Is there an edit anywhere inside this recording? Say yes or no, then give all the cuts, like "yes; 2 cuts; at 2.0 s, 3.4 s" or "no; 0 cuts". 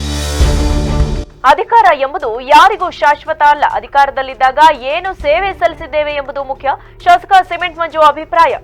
no; 0 cuts